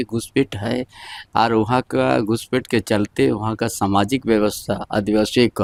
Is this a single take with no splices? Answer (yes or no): yes